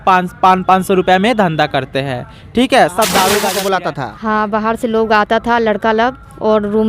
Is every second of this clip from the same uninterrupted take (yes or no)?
no